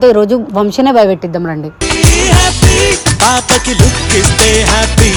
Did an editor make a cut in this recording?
no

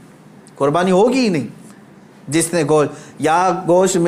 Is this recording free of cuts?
yes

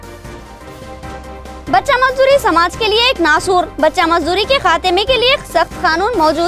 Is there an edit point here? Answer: yes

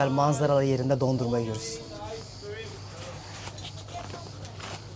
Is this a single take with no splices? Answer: yes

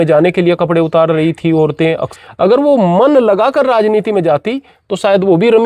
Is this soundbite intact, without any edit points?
no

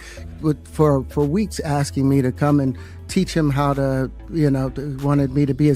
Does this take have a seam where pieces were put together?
no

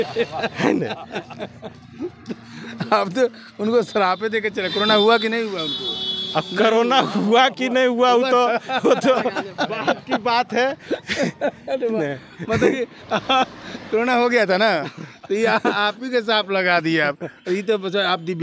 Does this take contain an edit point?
no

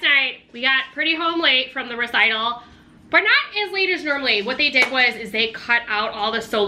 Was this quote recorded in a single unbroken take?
yes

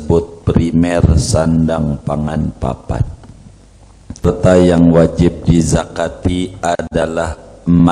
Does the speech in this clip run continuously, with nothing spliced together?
no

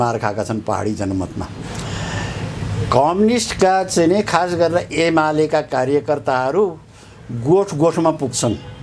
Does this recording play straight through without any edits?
yes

